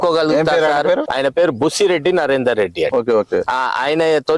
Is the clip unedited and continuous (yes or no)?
no